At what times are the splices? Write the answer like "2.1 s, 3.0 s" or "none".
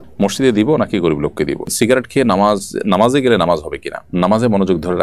1.7 s, 4.1 s